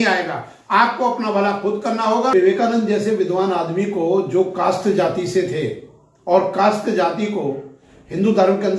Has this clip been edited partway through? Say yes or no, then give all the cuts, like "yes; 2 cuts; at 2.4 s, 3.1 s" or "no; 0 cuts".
yes; 1 cut; at 2.3 s